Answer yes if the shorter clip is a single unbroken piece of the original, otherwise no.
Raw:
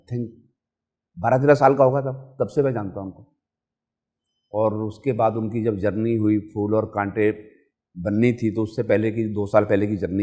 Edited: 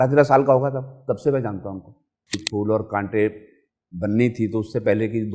no